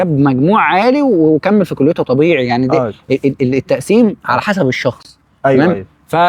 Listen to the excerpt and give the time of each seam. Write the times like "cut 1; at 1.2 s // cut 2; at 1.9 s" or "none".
none